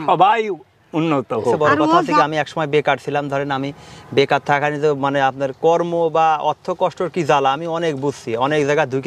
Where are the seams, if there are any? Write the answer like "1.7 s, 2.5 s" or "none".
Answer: 2.2 s